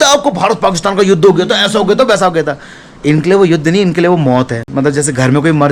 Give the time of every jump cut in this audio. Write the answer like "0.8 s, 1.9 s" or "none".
none